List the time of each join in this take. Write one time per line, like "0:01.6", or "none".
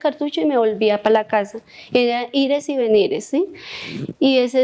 none